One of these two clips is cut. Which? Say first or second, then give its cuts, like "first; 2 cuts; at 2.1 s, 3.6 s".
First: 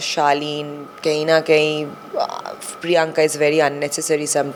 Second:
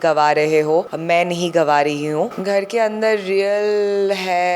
second; 2 cuts; at 0.9 s, 2.4 s